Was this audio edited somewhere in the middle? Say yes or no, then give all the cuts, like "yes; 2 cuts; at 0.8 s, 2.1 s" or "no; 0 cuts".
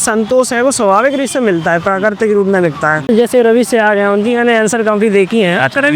yes; 1 cut; at 3.1 s